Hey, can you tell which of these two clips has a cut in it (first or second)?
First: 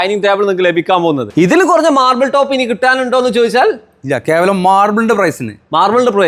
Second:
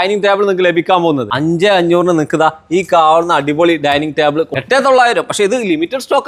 second